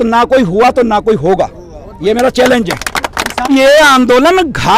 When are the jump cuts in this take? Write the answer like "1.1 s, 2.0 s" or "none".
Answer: 3.5 s